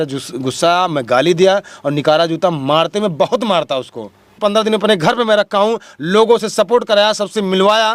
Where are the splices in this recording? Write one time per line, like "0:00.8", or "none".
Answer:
0:04.4